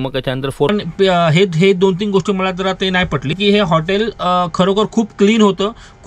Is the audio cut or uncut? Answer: cut